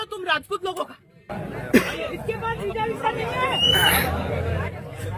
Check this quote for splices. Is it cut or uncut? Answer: cut